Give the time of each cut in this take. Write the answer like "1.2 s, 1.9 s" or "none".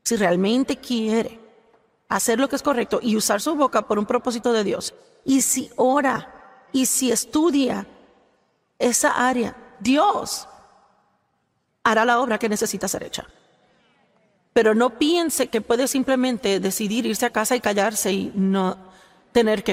none